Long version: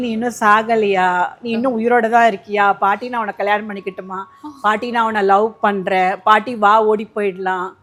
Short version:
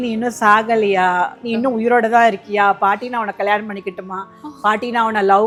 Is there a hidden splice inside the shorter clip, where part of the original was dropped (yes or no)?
no